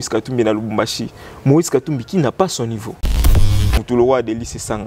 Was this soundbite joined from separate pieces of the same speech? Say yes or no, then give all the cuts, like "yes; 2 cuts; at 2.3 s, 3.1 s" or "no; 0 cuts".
yes; 1 cut; at 3.4 s